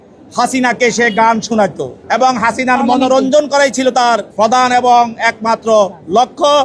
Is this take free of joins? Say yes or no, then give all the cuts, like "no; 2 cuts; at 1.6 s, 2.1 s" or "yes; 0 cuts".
no; 2 cuts; at 1.9 s, 3.8 s